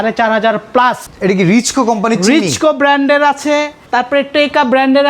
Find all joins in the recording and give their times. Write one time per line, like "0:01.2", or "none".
0:01.0
0:03.8